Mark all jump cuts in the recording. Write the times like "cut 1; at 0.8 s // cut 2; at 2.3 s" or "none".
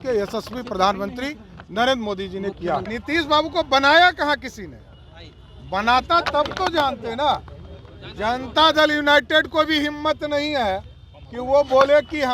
cut 1; at 2.9 s